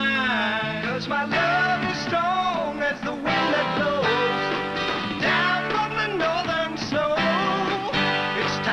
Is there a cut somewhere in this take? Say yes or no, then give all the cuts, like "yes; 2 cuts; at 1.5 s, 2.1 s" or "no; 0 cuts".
yes; 1 cut; at 6.3 s